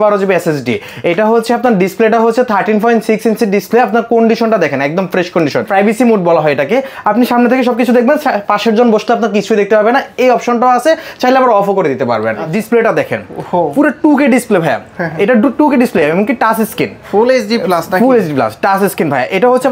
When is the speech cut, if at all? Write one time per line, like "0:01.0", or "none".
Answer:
0:05.7
0:12.5